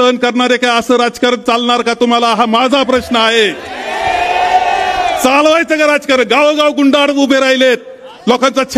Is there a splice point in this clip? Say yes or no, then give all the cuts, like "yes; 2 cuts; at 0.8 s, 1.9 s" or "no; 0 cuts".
no; 0 cuts